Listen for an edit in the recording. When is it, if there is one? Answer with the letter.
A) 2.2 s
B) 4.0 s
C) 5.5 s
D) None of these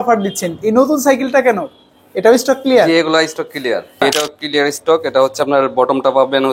B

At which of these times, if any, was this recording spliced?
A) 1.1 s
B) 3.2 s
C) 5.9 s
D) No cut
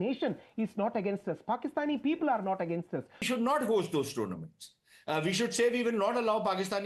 B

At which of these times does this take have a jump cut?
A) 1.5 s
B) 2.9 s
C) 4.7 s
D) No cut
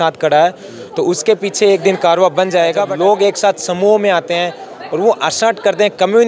B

